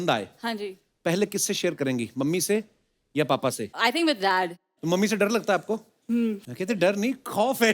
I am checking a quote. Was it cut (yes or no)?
yes